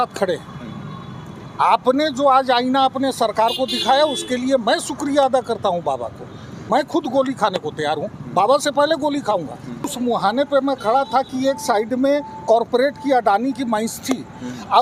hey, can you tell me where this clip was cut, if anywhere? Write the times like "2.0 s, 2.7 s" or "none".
6.6 s, 9.9 s